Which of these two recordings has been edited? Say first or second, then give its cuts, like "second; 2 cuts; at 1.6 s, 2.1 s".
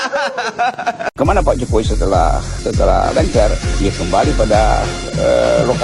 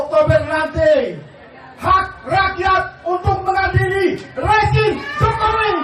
first; 2 cuts; at 1.1 s, 2.5 s